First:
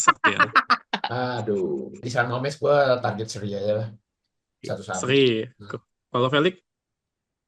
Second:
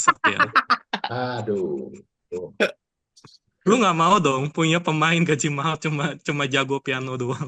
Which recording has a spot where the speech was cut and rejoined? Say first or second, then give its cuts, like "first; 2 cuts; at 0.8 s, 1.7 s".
first; 1 cut; at 2.0 s